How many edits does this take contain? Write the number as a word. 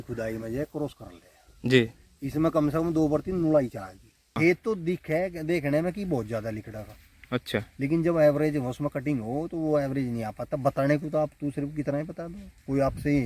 one